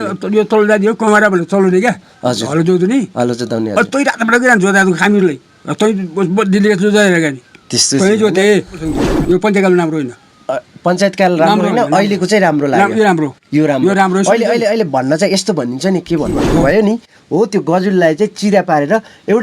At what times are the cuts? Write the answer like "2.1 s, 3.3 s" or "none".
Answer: 8.8 s, 16.4 s